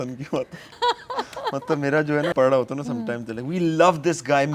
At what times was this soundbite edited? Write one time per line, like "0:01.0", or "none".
0:00.7
0:02.3